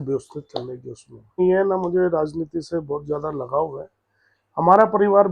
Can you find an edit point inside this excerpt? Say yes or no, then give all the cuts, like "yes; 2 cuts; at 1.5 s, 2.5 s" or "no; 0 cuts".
yes; 1 cut; at 1.4 s